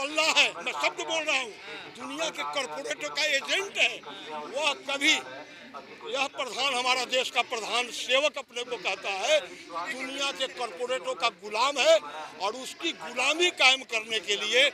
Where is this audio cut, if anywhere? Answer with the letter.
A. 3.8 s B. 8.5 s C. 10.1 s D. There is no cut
D